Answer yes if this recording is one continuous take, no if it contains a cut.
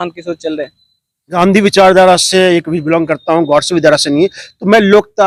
yes